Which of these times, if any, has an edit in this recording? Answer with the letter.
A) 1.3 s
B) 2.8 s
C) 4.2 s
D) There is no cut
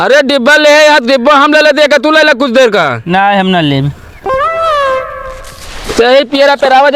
D